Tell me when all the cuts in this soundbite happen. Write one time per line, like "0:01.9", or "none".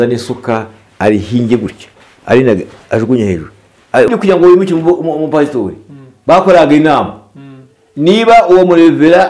0:04.1